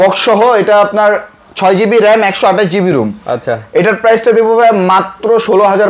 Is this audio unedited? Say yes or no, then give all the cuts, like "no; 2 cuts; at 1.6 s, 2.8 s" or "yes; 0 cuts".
yes; 0 cuts